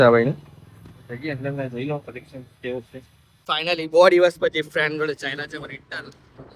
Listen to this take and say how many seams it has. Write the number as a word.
one